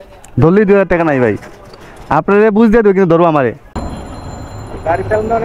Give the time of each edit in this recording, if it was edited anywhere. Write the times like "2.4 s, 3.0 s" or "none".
3.7 s